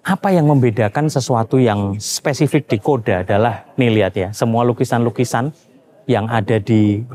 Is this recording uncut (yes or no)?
yes